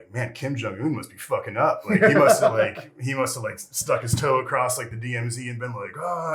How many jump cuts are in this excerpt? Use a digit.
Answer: 0